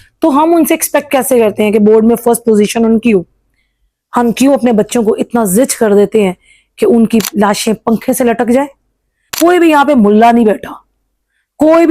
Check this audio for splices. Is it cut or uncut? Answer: cut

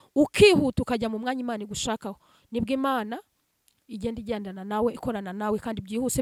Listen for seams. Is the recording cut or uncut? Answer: uncut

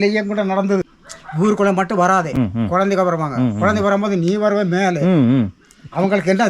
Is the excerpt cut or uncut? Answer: cut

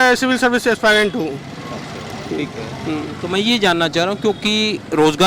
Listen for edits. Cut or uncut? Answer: uncut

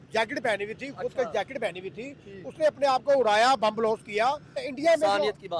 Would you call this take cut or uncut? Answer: cut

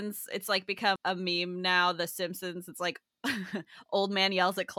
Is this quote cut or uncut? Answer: cut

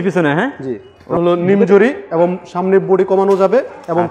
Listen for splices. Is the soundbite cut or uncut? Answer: cut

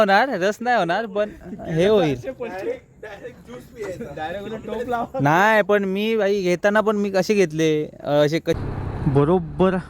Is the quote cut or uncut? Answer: cut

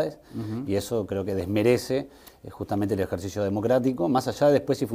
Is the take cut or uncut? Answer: uncut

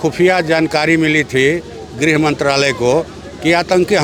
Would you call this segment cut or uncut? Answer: uncut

